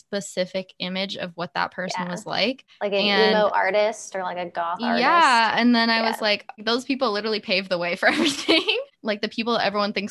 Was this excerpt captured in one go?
no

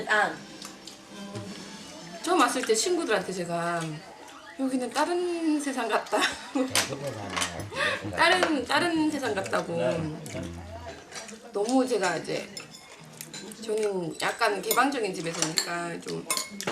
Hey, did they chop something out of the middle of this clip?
yes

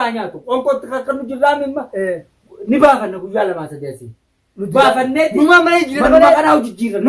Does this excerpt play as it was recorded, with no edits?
yes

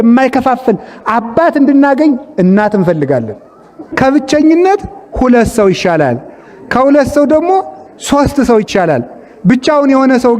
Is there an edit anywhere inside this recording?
yes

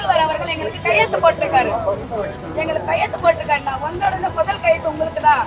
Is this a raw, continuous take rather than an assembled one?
yes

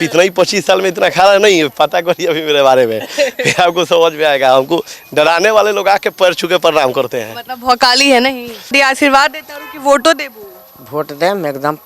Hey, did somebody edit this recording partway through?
yes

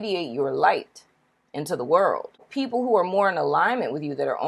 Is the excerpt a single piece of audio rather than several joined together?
no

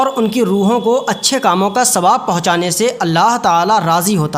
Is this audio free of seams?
yes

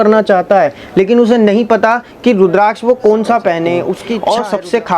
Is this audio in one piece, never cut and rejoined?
no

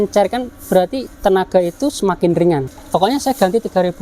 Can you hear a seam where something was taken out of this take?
yes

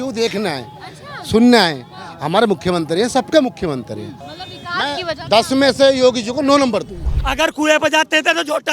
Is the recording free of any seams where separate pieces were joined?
no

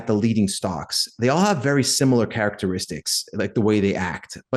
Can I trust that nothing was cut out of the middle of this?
yes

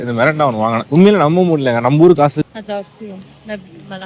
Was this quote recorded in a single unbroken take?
no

